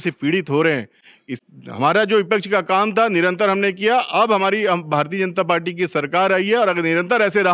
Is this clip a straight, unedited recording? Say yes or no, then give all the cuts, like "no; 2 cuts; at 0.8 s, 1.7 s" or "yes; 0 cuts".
yes; 0 cuts